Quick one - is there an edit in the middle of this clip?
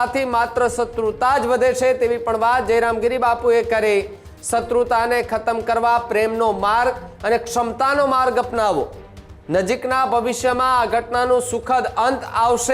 no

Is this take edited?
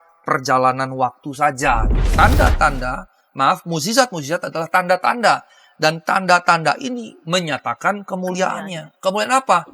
yes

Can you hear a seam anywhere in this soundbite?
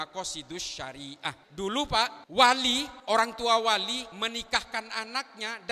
yes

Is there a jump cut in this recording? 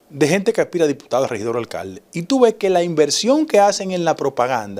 no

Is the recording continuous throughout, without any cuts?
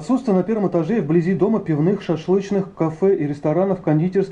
yes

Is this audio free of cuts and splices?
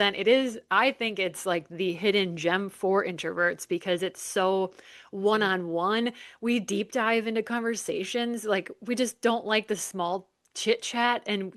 yes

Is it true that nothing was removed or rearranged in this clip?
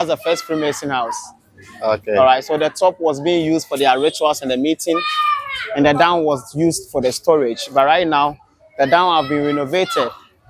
yes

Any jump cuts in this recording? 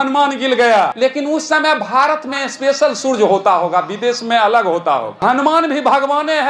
yes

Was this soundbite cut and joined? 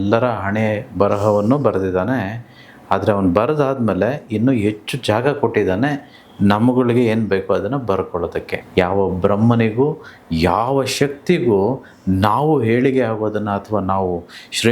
yes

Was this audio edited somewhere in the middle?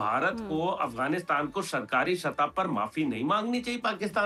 no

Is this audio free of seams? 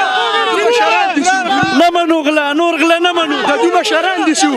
yes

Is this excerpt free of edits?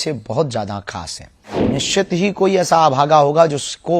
no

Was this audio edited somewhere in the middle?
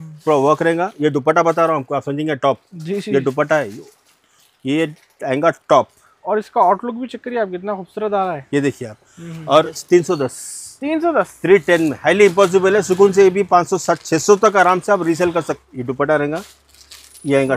yes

